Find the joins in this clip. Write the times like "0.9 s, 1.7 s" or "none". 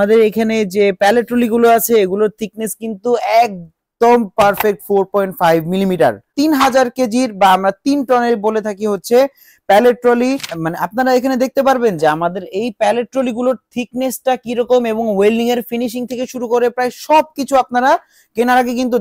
6.3 s, 10.5 s